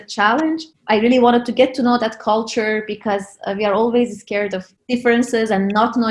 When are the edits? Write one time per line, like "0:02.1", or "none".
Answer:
none